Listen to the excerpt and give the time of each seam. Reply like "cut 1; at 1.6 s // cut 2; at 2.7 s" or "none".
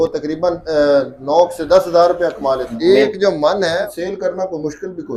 cut 1; at 2.7 s // cut 2; at 3.9 s